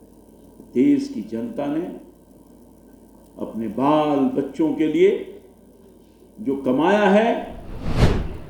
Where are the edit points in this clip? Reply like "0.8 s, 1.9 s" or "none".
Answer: none